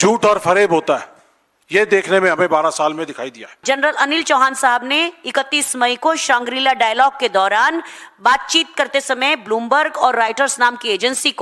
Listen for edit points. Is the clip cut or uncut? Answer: cut